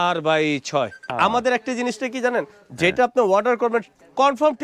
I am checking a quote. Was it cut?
yes; 1 cut; at 1.1 s

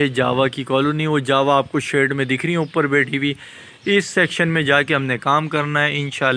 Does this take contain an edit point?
no; 0 cuts

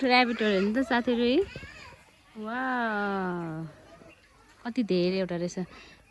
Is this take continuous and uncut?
yes; 0 cuts

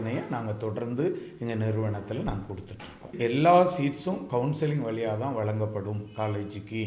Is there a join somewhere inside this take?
yes; 1 cut; at 3.1 s

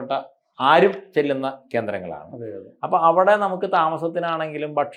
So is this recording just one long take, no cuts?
yes; 0 cuts

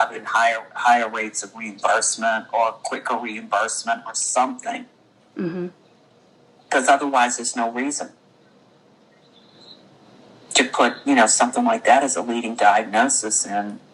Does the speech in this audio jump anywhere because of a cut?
no; 0 cuts

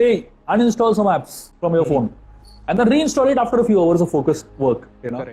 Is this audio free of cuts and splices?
yes; 0 cuts

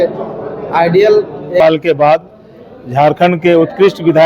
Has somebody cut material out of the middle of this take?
yes; 1 cut; at 1.6 s

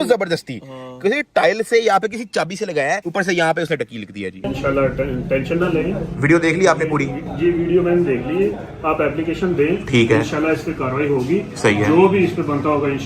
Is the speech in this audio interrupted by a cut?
yes; 1 cut; at 4.4 s

